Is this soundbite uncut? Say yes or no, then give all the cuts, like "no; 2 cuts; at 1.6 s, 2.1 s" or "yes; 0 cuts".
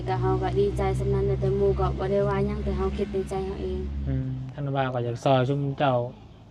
no; 1 cut; at 4.5 s